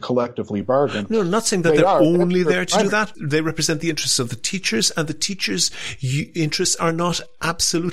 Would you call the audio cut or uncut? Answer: cut